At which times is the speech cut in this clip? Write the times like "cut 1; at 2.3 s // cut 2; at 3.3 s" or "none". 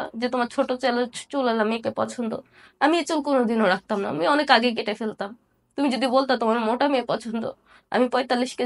none